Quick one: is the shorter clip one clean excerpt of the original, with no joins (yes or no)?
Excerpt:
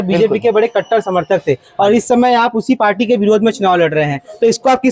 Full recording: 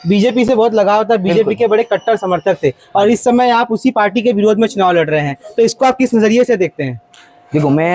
yes